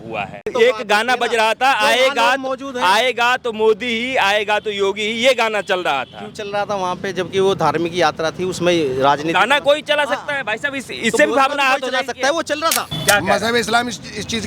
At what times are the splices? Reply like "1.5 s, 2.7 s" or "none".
12.9 s